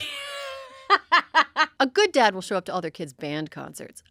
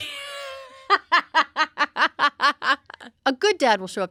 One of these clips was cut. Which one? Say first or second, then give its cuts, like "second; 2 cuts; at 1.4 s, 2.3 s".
first; 1 cut; at 1.7 s